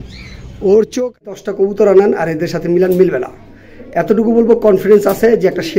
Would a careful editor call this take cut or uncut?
cut